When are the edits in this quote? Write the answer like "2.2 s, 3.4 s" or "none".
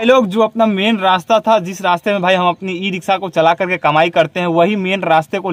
none

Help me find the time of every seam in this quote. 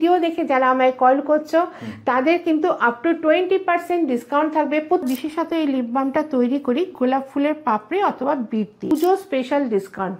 5.0 s, 8.9 s

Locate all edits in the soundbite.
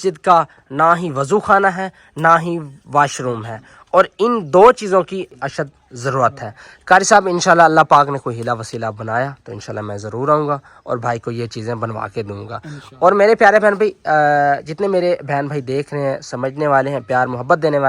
5.3 s

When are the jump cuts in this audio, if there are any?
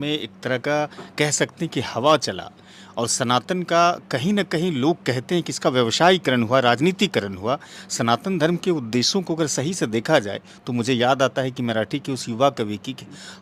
none

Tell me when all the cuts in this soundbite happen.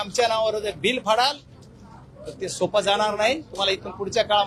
none

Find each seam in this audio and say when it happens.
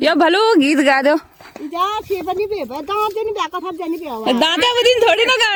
none

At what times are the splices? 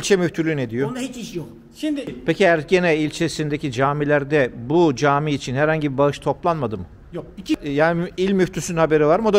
2.1 s, 7.6 s

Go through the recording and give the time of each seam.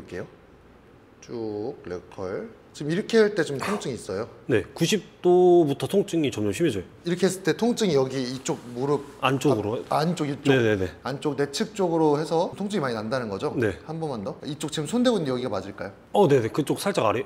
none

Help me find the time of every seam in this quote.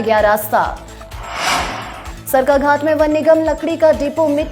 0.9 s

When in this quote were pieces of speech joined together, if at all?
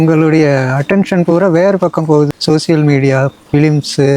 2.3 s

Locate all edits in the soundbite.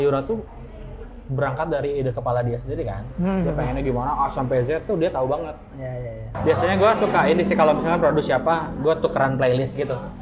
6.4 s

